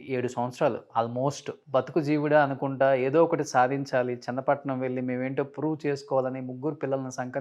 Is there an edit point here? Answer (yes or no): yes